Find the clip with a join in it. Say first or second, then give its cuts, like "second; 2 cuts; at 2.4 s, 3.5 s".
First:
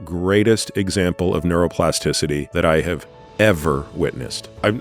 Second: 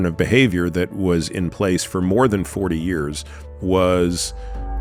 first; 1 cut; at 2.5 s